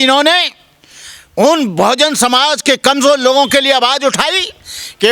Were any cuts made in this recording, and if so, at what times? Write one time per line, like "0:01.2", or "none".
none